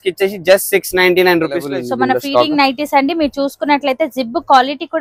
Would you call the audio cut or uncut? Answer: cut